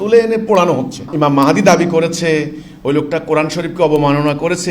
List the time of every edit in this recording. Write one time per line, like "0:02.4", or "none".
0:01.1